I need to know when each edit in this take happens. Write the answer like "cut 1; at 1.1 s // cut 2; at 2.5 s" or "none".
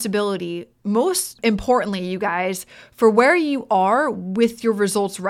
cut 1; at 1.4 s